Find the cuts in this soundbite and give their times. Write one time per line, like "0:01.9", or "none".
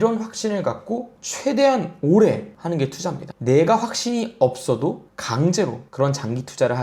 0:03.3